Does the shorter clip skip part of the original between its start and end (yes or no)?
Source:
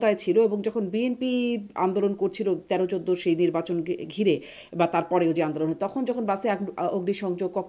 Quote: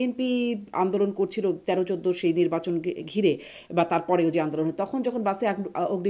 no